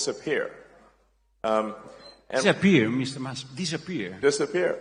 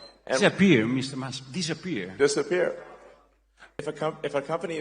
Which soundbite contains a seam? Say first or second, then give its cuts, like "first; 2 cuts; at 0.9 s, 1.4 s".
second; 1 cut; at 3.8 s